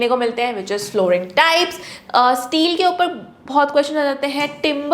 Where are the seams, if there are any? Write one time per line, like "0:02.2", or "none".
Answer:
0:01.9